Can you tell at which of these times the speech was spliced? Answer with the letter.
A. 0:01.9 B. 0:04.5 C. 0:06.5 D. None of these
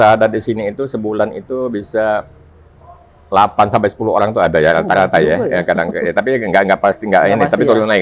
D